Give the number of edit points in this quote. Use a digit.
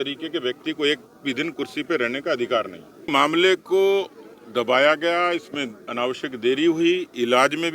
1